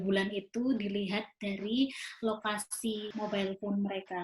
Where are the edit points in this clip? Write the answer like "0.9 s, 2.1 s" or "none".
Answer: 3.1 s

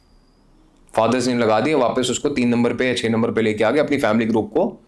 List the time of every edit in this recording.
none

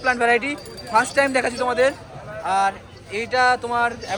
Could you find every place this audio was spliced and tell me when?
none

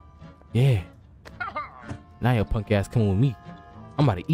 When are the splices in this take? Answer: none

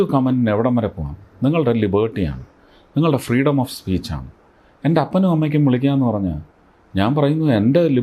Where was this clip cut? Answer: none

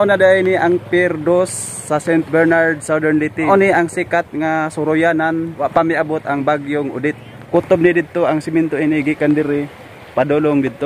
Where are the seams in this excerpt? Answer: 3.5 s, 5.6 s, 7.3 s

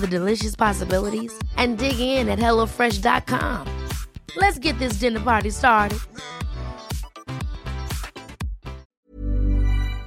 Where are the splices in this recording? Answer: 8.8 s

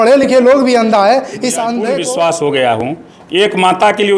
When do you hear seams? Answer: 1.9 s

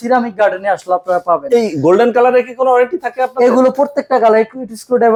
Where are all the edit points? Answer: none

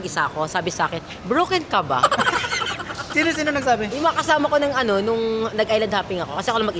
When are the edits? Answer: none

